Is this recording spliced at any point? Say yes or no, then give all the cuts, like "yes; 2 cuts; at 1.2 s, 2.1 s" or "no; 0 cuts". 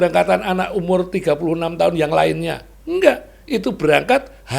no; 0 cuts